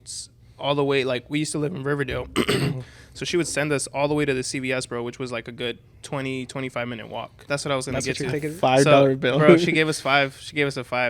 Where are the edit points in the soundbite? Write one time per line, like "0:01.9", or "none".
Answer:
0:07.4

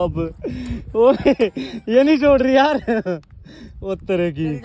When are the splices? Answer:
none

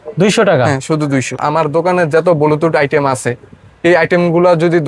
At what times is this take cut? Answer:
0:01.4

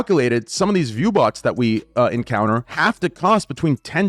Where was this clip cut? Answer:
0:02.7

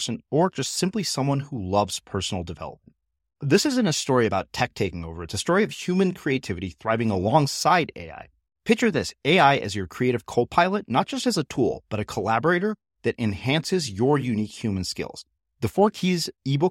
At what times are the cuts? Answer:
none

